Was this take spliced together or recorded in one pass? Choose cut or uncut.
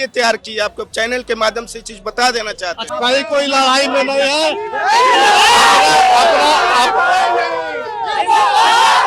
cut